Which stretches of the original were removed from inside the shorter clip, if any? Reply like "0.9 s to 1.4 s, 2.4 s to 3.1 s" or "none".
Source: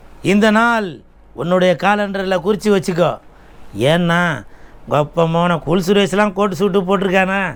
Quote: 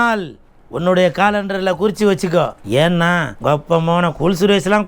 3.2 s to 3.7 s, 4.4 s to 4.8 s